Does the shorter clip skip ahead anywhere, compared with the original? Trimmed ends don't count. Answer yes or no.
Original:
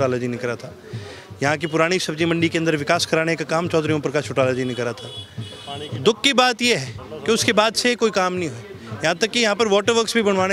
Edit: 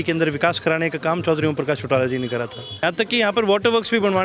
yes